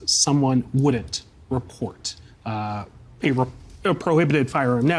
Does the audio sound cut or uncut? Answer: uncut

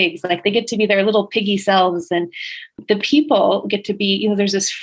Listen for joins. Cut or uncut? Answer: cut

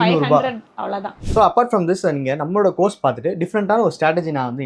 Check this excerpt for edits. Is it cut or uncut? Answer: cut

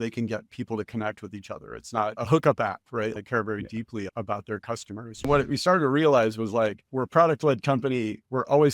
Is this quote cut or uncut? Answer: cut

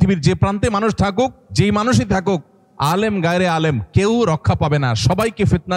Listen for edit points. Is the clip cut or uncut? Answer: cut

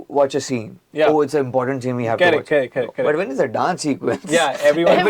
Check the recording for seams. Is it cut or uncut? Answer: uncut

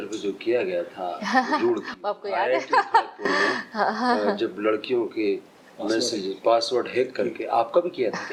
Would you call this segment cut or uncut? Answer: uncut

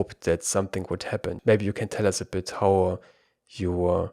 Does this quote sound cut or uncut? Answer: cut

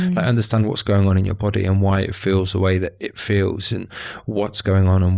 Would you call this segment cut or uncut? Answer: uncut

